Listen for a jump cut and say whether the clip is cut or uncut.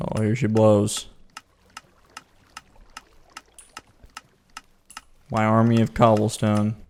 uncut